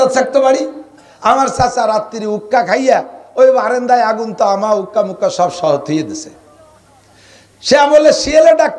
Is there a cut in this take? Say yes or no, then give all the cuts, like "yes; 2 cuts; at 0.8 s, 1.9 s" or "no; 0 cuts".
no; 0 cuts